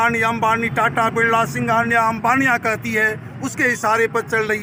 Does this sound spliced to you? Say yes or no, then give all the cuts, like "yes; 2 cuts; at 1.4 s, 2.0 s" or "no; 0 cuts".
no; 0 cuts